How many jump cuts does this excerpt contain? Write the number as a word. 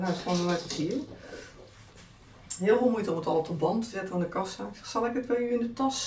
zero